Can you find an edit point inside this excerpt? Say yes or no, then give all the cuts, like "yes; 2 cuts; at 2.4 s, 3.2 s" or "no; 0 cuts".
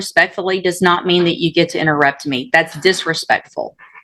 no; 0 cuts